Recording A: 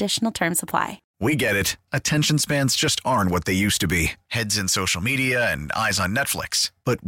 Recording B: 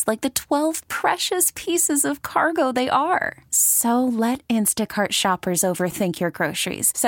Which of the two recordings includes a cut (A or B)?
A